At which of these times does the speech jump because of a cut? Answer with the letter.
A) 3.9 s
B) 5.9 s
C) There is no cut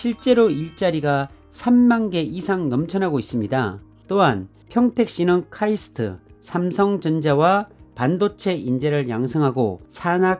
A